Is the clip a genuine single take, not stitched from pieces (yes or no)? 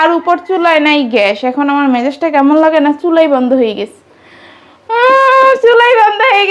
yes